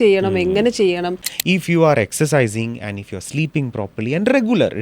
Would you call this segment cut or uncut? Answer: cut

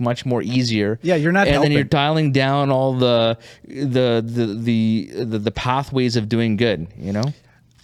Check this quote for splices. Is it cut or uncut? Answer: uncut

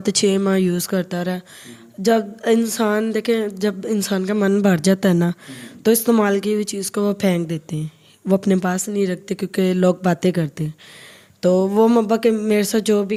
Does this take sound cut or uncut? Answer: uncut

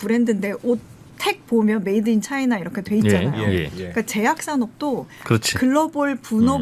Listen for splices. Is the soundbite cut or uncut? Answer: uncut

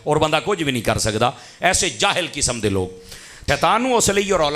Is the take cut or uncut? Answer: cut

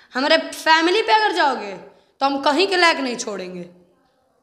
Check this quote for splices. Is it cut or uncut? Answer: uncut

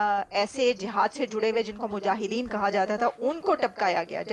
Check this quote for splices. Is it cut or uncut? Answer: uncut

